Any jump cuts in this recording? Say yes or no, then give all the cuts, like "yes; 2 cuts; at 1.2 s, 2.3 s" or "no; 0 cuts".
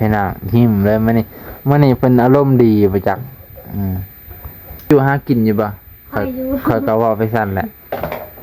yes; 1 cut; at 4.9 s